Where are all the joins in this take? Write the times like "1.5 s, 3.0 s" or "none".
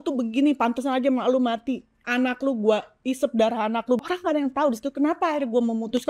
1.9 s, 4.0 s